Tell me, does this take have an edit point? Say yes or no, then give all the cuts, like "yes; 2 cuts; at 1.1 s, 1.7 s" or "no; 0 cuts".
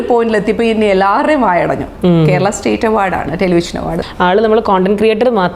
yes; 1 cut; at 4.0 s